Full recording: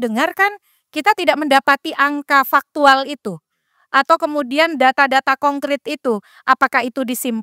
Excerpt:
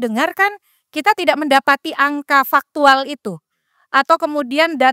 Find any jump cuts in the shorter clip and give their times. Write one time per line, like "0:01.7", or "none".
none